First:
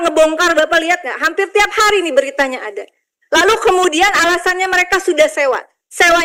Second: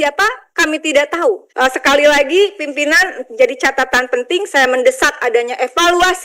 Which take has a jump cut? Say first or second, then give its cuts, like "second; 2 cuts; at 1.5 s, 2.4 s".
second; 1 cut; at 1.5 s